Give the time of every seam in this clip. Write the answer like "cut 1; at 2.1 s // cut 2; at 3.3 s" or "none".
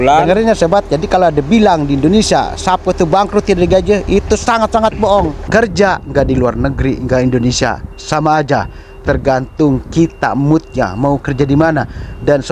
cut 1; at 5.4 s